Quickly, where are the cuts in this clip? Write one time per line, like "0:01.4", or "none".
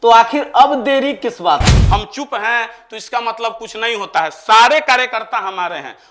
0:01.7

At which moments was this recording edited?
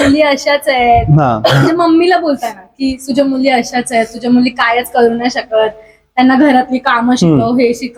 none

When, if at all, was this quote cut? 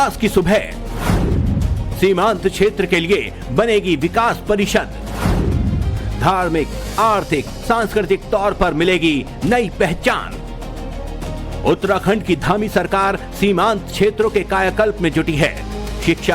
none

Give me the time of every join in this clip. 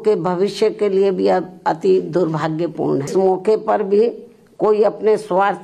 0:03.1

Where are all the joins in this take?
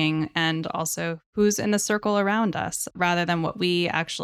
0:01.3
0:02.9

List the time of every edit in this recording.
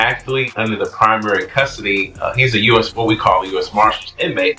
none

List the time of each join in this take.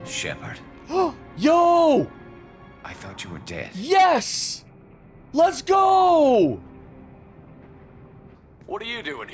0:08.3

